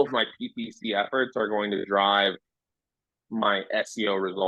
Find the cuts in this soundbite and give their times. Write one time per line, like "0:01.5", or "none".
none

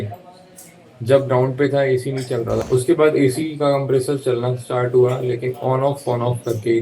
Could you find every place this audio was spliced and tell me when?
0:02.6

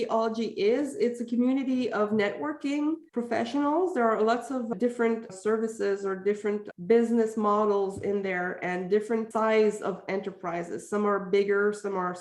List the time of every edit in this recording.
0:03.0
0:09.3

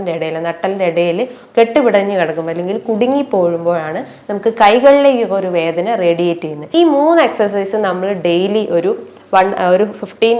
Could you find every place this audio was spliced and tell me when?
0:06.6

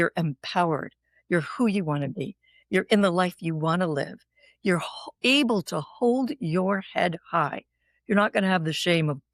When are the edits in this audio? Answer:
none

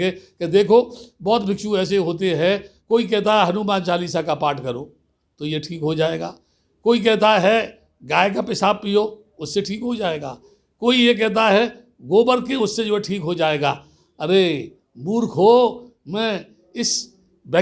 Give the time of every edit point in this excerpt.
0:02.7

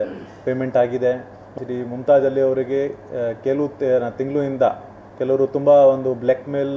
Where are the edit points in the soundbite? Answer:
0:01.5

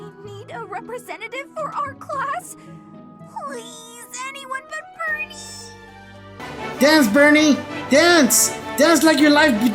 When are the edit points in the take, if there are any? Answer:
0:06.4

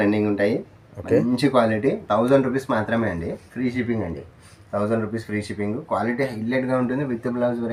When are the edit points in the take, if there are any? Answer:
none

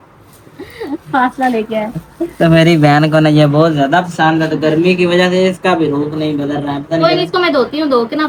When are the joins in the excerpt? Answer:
none

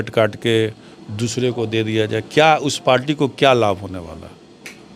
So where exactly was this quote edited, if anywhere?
none

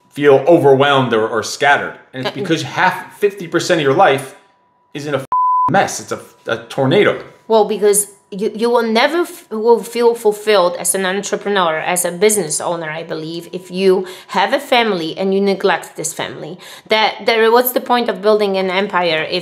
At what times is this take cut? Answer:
none

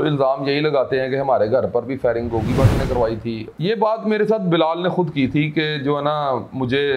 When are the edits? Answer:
0:03.5

